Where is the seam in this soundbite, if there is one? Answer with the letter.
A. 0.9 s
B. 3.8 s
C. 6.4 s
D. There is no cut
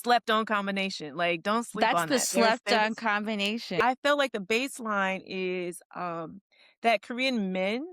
B